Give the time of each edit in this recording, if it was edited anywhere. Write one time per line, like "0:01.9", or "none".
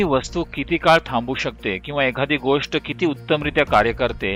none